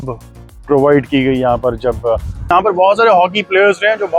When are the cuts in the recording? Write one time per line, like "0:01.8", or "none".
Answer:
0:02.5

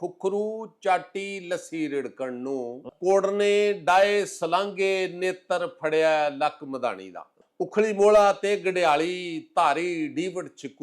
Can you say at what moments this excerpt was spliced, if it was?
0:02.8
0:07.4

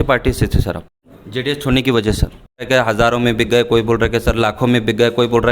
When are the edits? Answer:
0:00.9
0:02.7

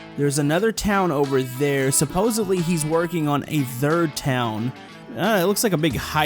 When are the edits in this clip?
0:05.0

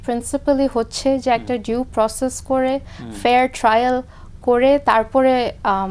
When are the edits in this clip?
none

